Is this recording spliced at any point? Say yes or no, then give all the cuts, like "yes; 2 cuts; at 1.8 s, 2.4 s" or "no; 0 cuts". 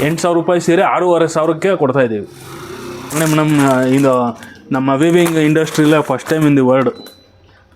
yes; 1 cut; at 3.0 s